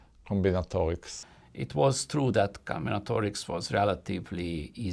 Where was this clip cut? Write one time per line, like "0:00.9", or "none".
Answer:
0:01.1